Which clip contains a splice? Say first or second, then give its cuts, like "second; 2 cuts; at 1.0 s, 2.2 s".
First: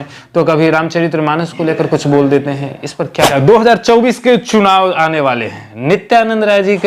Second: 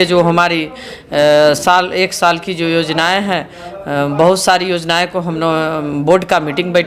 first; 1 cut; at 3.3 s